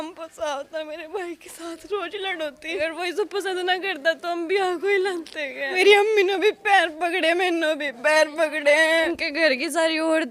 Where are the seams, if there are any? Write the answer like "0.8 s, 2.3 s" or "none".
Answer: 2.8 s, 5.7 s, 9.1 s